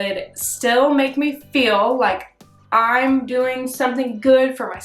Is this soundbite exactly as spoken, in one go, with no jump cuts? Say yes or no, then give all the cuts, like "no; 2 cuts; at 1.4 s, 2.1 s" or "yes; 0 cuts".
yes; 0 cuts